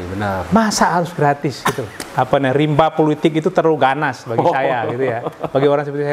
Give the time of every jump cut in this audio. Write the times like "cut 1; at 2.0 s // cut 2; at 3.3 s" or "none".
cut 1; at 1.9 s